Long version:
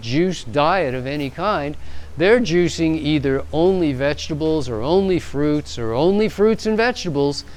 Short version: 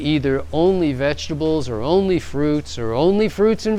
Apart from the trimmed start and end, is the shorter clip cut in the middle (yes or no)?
no